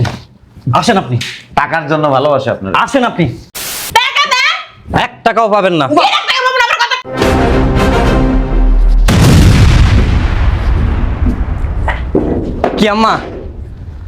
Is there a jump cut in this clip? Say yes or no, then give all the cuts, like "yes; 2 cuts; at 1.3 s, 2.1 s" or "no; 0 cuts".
yes; 1 cut; at 3.8 s